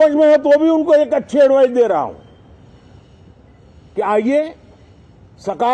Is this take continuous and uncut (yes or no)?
yes